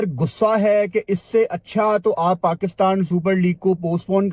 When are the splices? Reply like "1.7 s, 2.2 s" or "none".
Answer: none